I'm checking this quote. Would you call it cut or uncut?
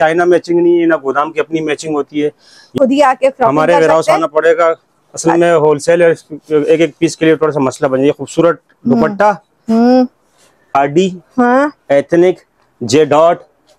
cut